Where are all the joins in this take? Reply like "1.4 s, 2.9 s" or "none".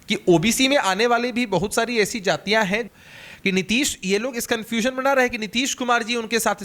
2.9 s